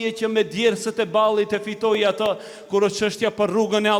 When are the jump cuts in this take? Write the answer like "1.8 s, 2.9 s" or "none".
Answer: none